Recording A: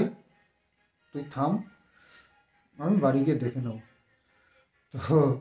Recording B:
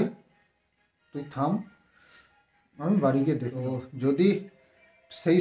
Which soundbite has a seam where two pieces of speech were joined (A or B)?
B